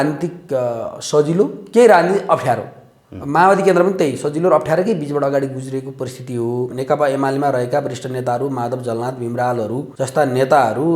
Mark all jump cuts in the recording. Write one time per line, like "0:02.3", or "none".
0:06.7
0:09.9